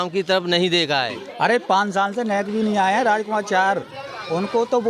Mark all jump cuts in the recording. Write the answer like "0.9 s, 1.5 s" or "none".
1.2 s